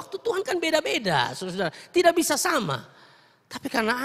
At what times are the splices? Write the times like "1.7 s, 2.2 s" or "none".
none